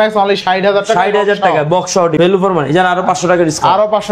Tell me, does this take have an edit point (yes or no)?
yes